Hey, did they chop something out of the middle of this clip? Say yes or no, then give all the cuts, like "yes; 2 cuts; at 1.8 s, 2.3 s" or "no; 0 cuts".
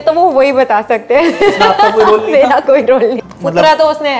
yes; 1 cut; at 3.2 s